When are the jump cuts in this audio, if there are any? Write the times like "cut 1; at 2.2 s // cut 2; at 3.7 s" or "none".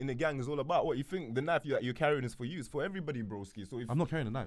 none